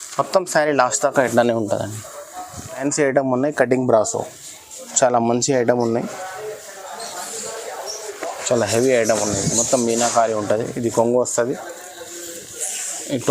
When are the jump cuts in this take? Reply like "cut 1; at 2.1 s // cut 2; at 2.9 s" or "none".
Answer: cut 1; at 2.8 s